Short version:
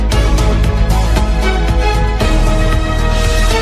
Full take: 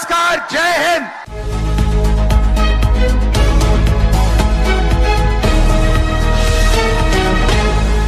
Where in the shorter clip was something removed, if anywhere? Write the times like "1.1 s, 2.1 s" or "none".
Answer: none